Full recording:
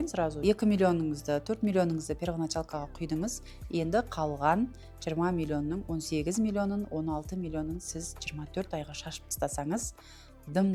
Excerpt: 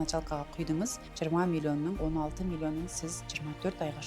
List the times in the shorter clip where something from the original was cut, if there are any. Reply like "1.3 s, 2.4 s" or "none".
1.0 s, 2.0 s